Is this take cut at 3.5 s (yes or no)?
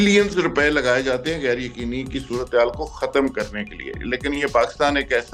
no